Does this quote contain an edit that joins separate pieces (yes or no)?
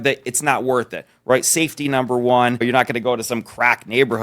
yes